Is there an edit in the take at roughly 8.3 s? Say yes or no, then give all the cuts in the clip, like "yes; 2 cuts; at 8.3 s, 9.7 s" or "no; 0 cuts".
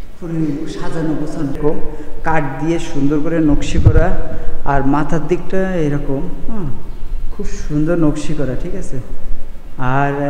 no; 1 cut; at 1.6 s